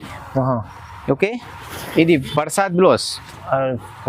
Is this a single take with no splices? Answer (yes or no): yes